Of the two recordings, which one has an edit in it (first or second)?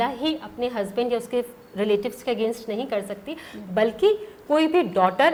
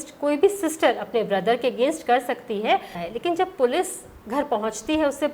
second